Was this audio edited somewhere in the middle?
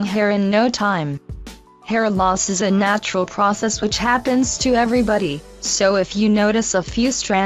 no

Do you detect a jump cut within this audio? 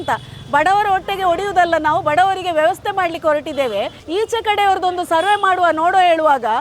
no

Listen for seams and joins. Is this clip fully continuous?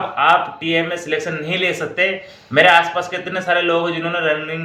yes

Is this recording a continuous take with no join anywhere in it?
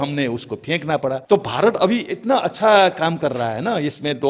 no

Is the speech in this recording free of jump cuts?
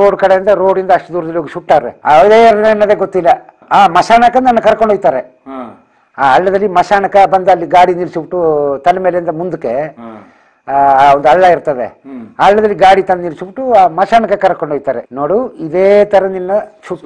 yes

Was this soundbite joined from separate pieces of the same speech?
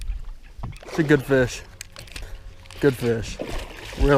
no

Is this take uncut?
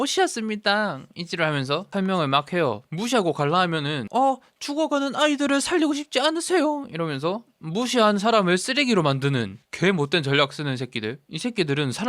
no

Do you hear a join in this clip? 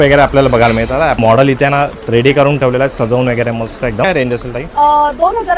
yes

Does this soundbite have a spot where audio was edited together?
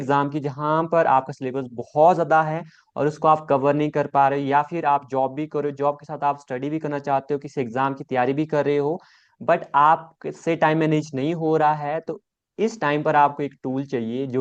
no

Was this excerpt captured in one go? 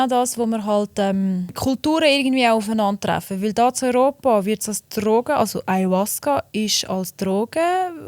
no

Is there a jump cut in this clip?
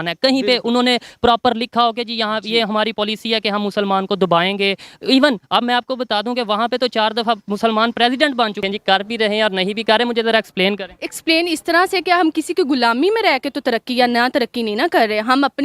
yes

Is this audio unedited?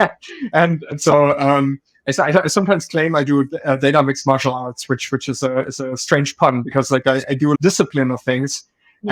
yes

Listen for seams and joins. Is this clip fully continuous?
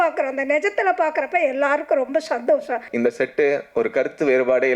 no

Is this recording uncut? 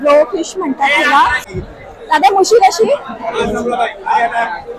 no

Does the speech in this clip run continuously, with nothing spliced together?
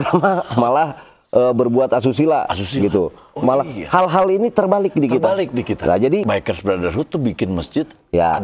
no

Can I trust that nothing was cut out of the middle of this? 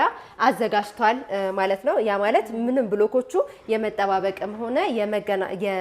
yes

